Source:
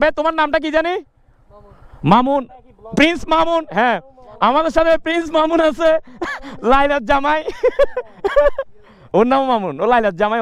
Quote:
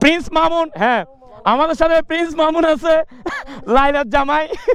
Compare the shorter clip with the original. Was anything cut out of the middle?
no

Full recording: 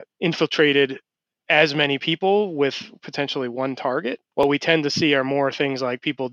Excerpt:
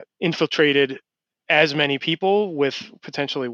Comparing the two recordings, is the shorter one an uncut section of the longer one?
yes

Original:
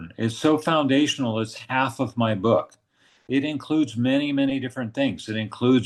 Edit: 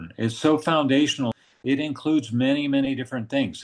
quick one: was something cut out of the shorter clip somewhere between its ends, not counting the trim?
yes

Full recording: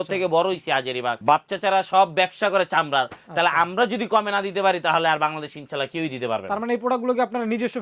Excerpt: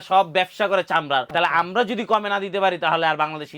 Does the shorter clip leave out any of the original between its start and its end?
yes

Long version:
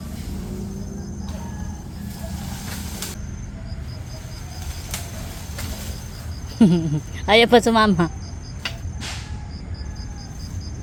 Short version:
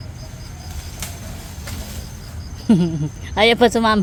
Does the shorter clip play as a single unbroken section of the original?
yes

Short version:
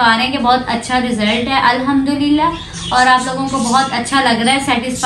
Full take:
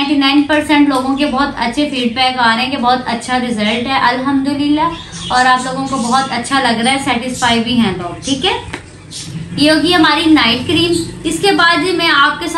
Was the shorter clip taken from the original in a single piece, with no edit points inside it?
yes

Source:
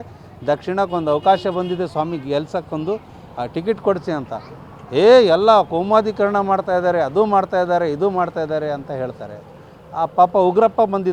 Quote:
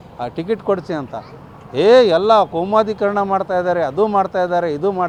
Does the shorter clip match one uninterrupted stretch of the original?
yes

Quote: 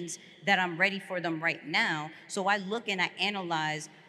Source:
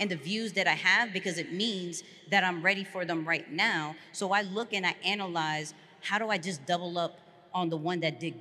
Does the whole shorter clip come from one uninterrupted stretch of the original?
yes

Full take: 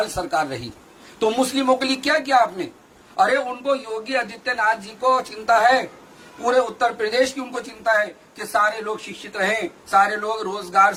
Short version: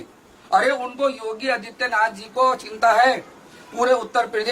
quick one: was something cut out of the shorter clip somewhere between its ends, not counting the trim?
no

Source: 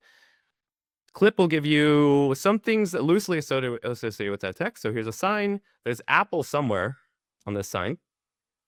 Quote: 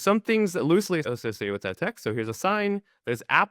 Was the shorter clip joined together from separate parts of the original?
yes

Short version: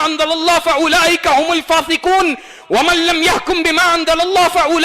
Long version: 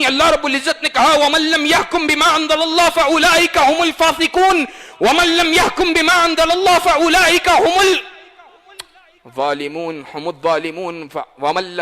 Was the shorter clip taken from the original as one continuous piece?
yes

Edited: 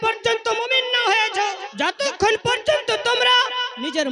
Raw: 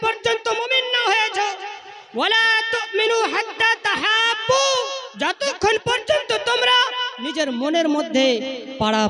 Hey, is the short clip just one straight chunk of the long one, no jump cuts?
no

